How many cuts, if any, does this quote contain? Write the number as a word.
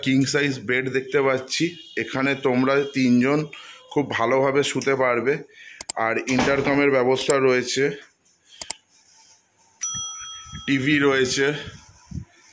zero